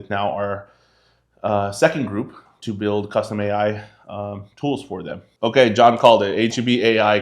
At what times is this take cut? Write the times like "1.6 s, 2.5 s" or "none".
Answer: 5.2 s